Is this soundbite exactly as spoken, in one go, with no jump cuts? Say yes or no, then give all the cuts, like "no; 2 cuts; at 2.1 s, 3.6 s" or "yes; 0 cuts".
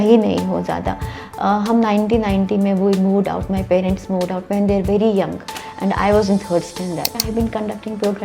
no; 1 cut; at 7.2 s